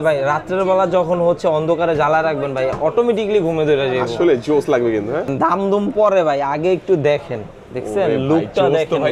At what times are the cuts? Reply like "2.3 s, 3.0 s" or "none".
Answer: 5.3 s